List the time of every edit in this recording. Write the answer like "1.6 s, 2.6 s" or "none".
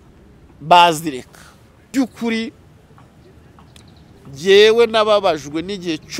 1.9 s

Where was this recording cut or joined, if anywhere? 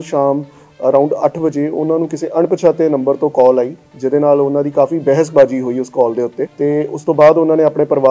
6.4 s

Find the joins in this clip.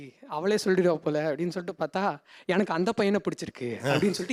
none

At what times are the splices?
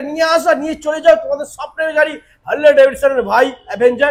none

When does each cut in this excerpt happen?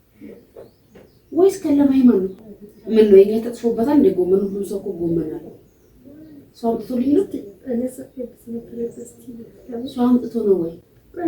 2.3 s

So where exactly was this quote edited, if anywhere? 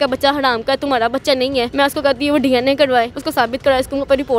1.7 s, 3.2 s

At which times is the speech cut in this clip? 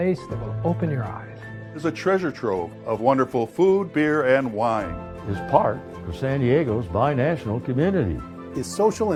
none

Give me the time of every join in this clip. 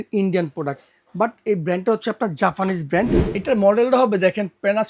3.2 s

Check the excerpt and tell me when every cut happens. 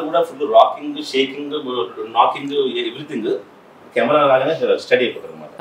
none

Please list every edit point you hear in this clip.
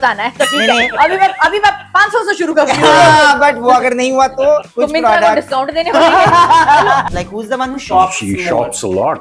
4.7 s, 7.0 s

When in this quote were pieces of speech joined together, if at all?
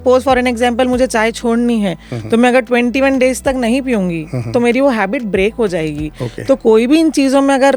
none

